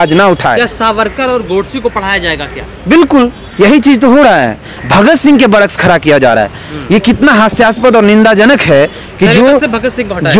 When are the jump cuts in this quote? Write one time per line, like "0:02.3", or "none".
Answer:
0:04.8